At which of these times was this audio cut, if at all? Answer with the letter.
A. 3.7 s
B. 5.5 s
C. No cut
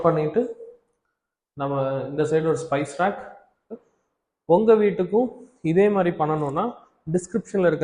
A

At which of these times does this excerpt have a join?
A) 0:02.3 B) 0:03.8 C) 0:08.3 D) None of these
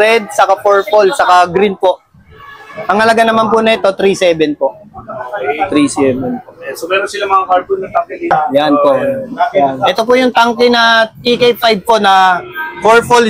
C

